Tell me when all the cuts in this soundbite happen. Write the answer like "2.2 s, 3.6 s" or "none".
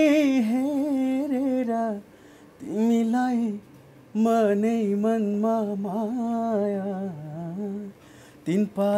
none

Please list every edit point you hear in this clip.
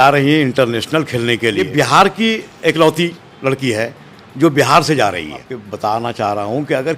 1.6 s, 5.6 s

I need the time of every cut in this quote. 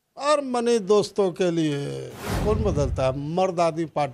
2.3 s

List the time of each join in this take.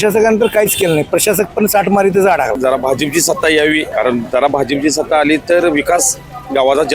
2.6 s, 3.9 s

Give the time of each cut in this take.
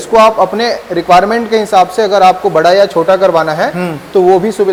none

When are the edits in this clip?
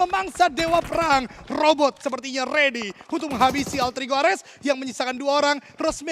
none

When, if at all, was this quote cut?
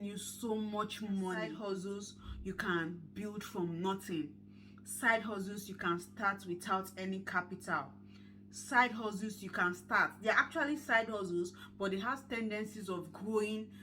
1.6 s

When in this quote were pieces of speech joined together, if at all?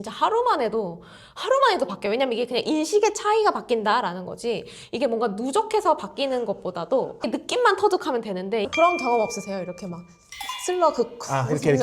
8.7 s

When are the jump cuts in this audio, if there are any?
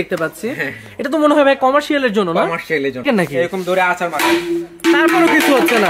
3.0 s

